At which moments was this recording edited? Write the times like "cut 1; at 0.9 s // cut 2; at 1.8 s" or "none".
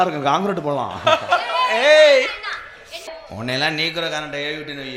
cut 1; at 3.1 s